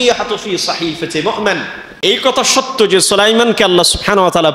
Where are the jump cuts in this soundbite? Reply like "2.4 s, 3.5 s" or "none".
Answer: 2.0 s